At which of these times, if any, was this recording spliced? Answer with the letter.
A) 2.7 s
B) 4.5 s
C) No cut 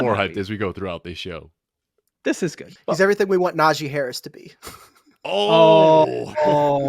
A